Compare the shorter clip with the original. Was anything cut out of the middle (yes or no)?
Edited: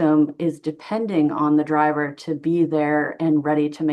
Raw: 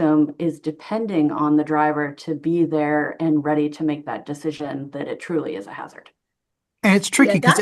no